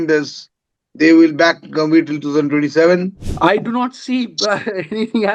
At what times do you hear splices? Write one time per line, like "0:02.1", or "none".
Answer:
0:03.2